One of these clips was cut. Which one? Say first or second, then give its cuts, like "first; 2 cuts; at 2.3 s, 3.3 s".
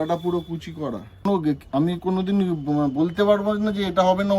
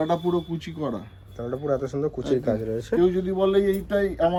first; 1 cut; at 1.2 s